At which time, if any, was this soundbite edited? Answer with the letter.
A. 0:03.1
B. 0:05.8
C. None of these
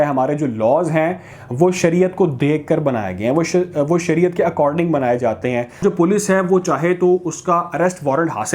B